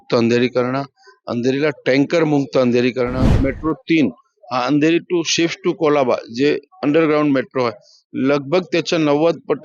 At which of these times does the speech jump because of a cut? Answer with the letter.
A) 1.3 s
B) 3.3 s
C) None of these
B